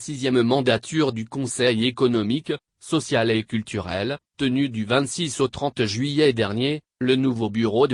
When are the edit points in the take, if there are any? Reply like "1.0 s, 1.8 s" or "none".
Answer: none